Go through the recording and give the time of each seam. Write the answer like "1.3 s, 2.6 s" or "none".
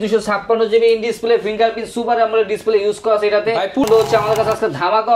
3.8 s